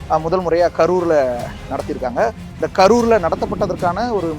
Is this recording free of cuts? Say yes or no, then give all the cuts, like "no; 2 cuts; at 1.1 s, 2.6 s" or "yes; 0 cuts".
yes; 0 cuts